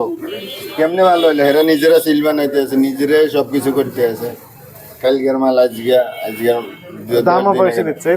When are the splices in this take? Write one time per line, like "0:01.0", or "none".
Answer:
none